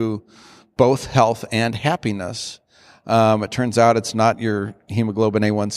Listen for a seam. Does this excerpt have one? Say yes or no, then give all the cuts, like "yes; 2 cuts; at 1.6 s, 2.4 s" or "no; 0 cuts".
no; 0 cuts